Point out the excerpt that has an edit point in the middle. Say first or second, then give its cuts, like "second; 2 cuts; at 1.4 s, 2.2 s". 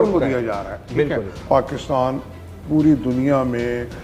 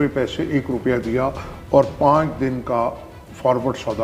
first; 1 cut; at 1.4 s